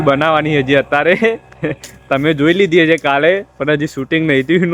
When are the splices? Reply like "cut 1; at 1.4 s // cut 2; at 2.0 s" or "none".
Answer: none